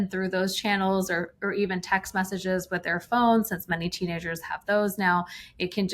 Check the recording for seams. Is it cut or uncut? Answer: uncut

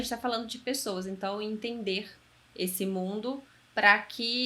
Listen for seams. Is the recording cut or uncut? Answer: uncut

